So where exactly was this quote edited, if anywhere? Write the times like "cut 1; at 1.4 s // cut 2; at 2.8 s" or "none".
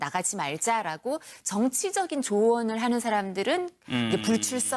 cut 1; at 1.9 s